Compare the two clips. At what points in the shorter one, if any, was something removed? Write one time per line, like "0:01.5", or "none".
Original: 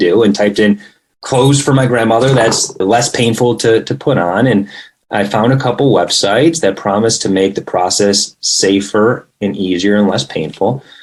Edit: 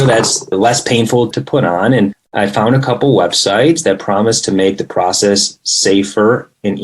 0:01.3
0:02.2